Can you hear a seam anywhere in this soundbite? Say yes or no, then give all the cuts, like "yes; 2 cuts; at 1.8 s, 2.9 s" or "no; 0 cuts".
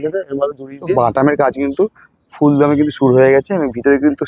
yes; 1 cut; at 0.9 s